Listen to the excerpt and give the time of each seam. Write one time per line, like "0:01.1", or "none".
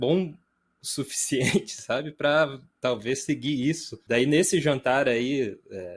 0:03.9